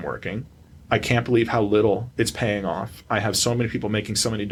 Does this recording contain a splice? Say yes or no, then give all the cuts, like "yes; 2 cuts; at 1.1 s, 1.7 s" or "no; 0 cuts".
no; 0 cuts